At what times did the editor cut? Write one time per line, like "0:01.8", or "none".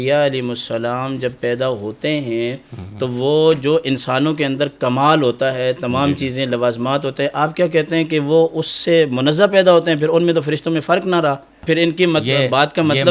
0:11.6